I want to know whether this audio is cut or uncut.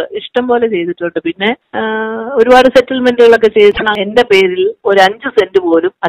cut